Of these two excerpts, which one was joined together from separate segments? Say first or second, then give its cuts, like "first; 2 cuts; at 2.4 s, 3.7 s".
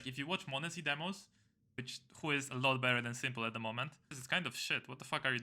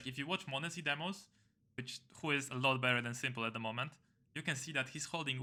first; 1 cut; at 4.1 s